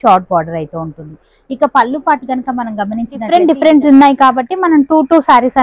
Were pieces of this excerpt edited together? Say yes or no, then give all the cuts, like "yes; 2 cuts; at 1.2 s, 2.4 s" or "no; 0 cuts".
yes; 1 cut; at 3.2 s